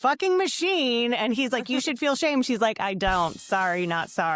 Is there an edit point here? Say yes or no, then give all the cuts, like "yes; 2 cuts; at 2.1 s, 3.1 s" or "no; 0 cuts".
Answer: no; 0 cuts